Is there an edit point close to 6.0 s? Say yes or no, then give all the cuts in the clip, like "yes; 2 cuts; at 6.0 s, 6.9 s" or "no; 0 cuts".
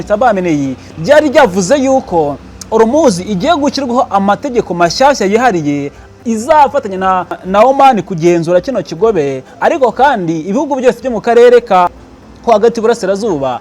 no; 2 cuts; at 7.4 s, 12.0 s